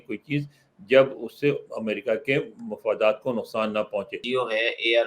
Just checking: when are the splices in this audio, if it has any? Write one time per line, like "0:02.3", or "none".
0:04.2